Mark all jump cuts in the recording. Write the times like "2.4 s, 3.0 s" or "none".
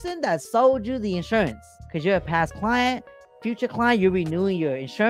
1.7 s